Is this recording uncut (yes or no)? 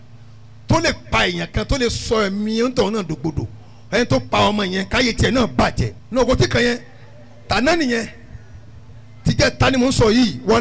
no